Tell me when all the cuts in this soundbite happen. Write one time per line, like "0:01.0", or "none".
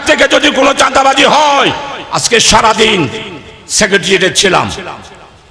none